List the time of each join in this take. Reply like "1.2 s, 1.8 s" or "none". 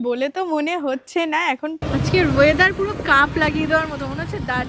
1.8 s